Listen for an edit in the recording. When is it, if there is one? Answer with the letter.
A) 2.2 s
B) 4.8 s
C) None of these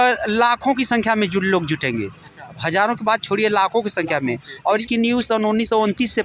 B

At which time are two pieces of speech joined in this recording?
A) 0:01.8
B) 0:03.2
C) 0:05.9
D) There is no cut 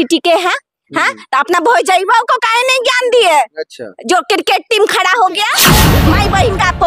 C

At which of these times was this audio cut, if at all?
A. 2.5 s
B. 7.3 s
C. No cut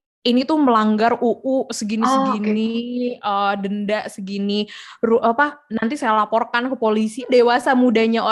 B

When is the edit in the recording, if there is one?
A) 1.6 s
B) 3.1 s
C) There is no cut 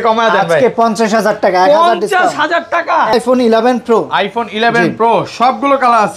B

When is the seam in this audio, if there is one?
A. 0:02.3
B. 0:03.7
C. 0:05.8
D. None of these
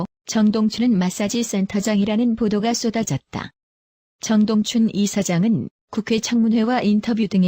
A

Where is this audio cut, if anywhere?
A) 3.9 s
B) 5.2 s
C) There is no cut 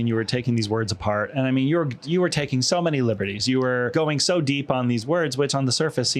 A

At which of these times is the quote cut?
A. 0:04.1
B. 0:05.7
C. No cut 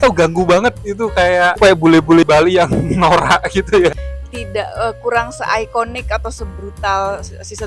A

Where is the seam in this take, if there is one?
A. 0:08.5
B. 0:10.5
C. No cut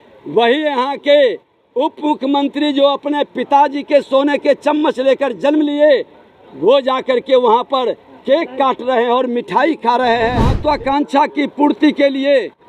B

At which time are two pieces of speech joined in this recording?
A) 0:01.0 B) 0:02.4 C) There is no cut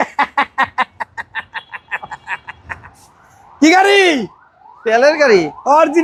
C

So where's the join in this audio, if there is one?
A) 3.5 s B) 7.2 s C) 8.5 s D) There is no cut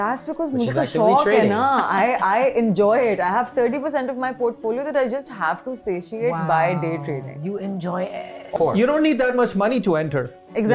C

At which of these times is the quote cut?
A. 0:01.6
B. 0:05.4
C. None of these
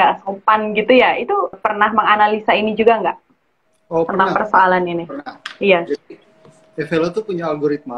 A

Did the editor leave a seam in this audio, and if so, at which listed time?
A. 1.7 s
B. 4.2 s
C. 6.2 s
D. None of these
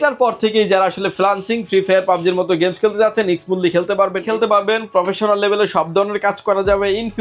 B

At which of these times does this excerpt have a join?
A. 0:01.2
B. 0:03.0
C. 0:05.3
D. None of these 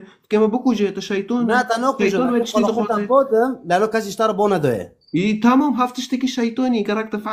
D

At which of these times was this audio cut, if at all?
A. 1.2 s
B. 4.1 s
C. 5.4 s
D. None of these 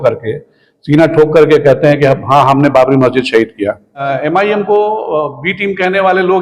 B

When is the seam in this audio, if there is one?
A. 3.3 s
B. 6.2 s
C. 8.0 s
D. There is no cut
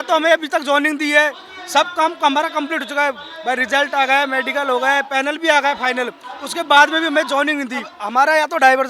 C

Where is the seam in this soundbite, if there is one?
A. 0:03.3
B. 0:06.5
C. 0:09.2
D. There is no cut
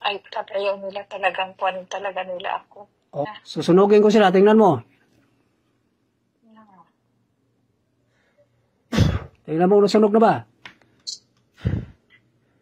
A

